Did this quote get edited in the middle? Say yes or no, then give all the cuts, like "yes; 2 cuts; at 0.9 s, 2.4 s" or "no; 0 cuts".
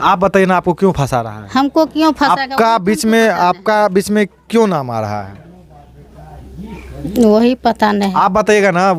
no; 0 cuts